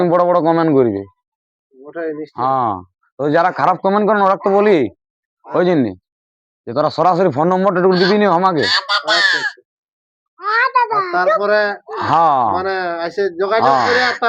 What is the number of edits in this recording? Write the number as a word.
zero